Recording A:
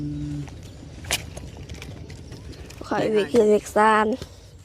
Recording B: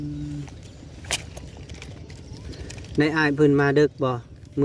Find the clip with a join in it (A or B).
A